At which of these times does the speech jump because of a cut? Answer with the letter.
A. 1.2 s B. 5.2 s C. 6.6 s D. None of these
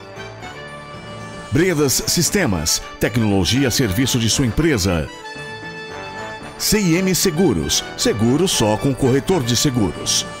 A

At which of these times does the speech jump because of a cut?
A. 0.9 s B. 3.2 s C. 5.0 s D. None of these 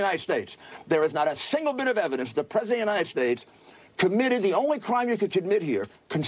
A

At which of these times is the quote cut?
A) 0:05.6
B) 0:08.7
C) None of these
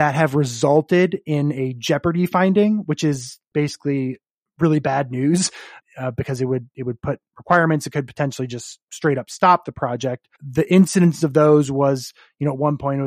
A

